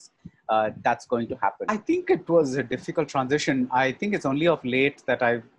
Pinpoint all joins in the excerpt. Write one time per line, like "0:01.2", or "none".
0:01.7